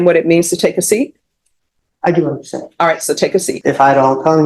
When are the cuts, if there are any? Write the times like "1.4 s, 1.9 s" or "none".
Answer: 3.5 s